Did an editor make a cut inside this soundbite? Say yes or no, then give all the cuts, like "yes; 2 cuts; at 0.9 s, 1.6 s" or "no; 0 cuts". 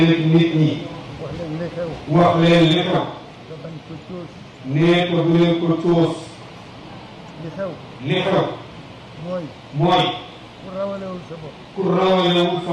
no; 0 cuts